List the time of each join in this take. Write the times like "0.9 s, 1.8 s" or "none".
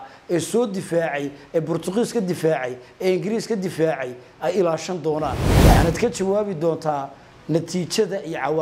5.5 s